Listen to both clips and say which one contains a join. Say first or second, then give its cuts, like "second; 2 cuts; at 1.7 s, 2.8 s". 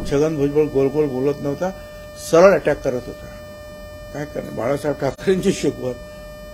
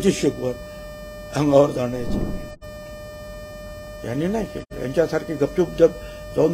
second; 1 cut; at 2.2 s